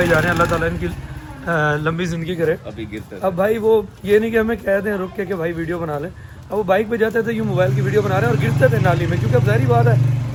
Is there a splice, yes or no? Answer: no